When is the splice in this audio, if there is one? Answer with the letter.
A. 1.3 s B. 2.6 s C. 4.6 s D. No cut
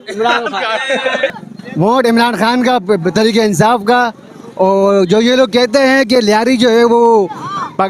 A